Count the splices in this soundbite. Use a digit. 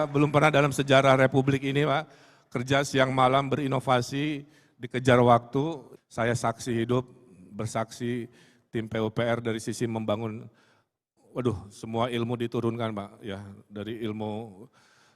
1